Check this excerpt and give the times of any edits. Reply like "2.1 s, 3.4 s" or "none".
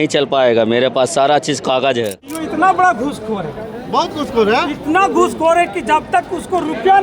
2.2 s